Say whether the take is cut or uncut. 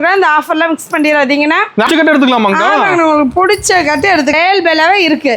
cut